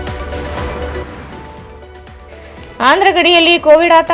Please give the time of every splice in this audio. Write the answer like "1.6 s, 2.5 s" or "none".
none